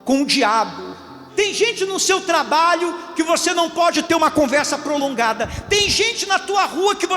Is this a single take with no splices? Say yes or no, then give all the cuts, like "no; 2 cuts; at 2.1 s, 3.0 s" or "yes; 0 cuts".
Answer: no; 1 cut; at 1.2 s